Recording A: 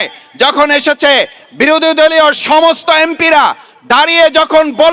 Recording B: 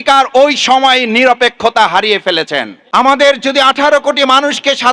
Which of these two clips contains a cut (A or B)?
B